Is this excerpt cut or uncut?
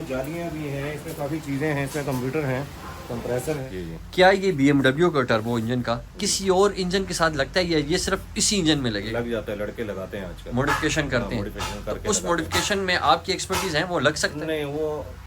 cut